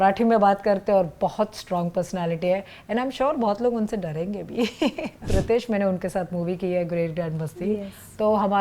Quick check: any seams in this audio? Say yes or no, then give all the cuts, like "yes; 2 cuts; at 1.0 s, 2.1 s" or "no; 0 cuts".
yes; 1 cut; at 5.3 s